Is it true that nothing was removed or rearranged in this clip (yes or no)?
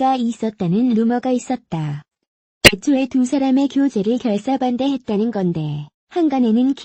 no